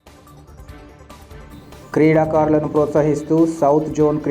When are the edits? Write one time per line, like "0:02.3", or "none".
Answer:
none